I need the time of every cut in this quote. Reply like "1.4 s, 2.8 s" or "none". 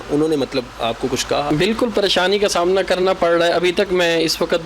1.5 s

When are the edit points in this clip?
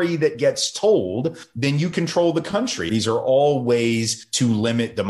2.9 s

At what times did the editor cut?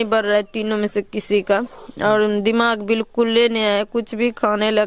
none

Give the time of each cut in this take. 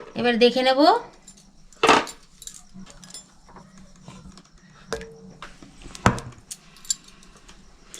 2.8 s

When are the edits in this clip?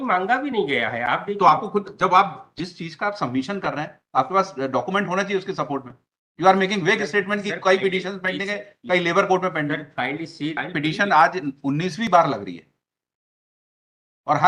10.6 s

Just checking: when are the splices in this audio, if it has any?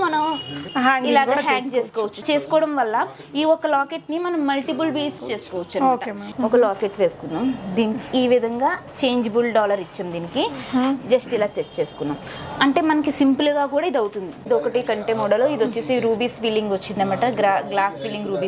2.2 s, 5.2 s, 6.2 s, 14.4 s

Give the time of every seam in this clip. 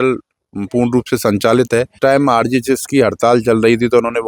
1.9 s

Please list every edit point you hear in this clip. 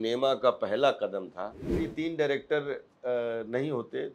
1.7 s

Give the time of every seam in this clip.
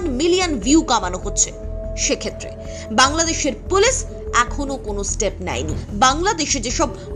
5.8 s

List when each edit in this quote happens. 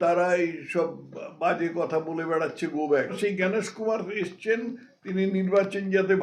3.2 s

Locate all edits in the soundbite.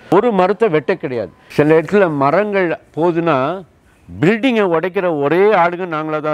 1.3 s

